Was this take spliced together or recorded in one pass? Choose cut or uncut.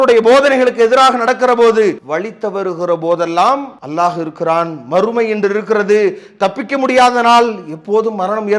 cut